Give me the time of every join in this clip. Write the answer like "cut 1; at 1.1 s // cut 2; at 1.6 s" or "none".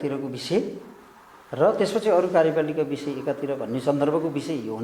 none